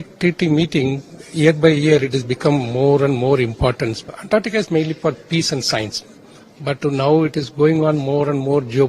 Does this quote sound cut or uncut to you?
cut